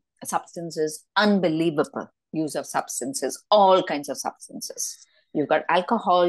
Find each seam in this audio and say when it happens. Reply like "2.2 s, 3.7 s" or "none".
none